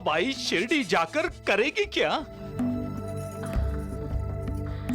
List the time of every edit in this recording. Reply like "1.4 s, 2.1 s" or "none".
none